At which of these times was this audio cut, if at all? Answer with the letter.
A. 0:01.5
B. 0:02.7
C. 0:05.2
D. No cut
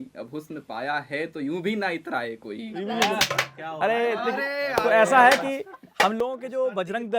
B